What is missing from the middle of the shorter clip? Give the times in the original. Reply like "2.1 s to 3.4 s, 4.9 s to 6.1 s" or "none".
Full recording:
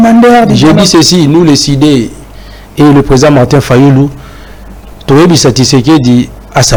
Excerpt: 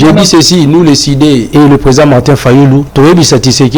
2.1 s to 2.7 s, 4.1 s to 5.0 s